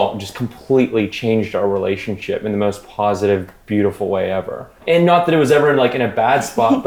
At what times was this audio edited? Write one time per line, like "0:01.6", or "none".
none